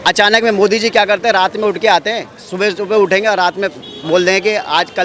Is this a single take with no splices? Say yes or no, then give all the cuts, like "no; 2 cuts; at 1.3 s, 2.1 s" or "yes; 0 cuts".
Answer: yes; 0 cuts